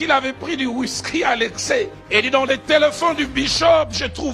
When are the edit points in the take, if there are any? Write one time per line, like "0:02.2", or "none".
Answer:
0:02.0